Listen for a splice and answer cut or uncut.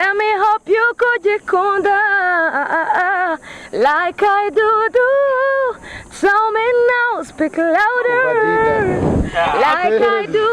uncut